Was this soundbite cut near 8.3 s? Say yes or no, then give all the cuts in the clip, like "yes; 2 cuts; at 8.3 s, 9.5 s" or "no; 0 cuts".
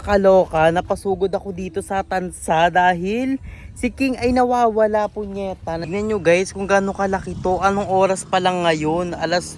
no; 1 cut; at 5.8 s